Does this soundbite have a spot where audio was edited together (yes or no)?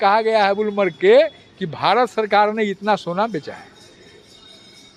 no